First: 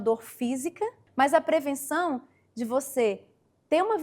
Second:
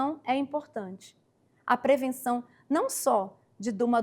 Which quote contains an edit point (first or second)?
first